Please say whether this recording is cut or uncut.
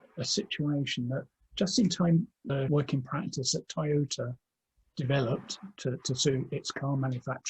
cut